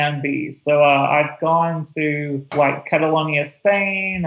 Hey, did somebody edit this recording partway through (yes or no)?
yes